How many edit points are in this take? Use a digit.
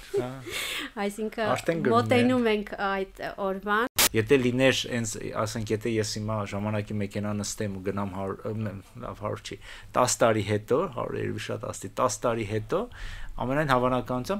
1